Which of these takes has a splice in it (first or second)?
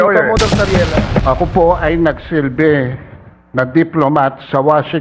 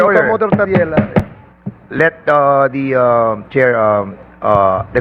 first